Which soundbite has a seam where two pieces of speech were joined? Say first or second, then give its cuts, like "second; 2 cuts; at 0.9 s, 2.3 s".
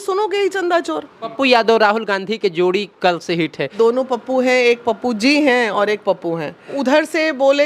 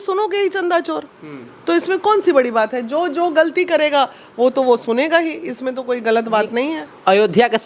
first; 3 cuts; at 1.3 s, 3.7 s, 6.8 s